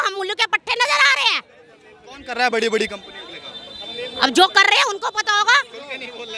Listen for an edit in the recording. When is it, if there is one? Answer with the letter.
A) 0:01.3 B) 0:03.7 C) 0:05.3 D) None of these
D